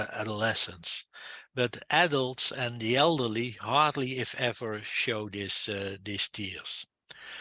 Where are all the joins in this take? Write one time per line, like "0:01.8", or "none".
none